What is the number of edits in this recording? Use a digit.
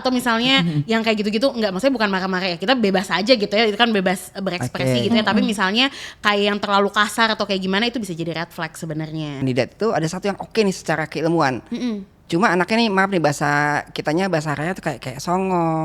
1